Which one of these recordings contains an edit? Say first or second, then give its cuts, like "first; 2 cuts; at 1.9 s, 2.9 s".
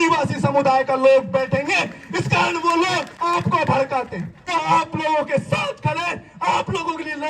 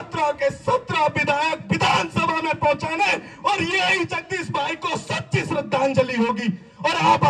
first; 2 cuts; at 3.1 s, 4.4 s